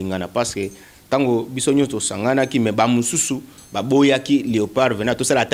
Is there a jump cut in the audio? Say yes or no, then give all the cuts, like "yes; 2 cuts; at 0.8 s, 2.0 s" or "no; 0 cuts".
no; 0 cuts